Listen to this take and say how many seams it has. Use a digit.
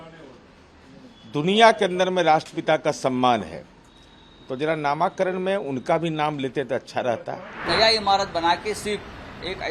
1